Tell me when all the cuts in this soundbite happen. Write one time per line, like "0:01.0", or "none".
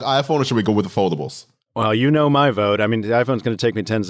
0:02.0